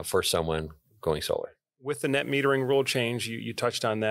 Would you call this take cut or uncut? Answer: cut